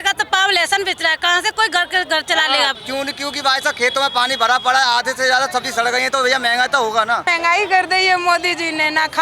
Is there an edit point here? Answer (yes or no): yes